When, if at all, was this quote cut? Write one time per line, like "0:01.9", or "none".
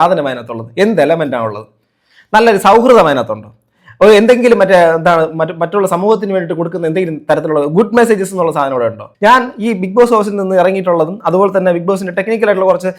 0:09.1